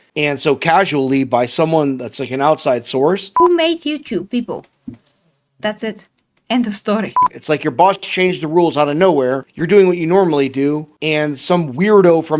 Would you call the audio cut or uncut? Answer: cut